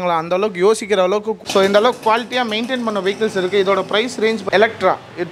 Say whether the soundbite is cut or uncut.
cut